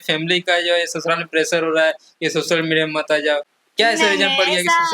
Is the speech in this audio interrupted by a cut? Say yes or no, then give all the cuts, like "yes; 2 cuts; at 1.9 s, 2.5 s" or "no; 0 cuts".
no; 0 cuts